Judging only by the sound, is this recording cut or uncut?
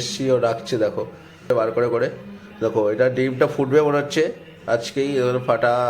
cut